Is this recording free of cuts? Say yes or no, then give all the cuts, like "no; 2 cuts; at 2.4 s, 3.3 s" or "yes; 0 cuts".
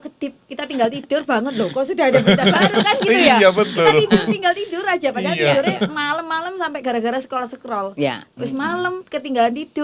yes; 0 cuts